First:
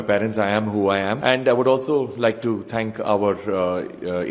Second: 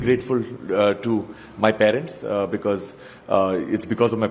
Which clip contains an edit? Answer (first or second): first